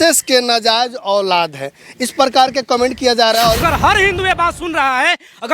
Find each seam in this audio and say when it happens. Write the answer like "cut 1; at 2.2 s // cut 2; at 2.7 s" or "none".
cut 1; at 3.6 s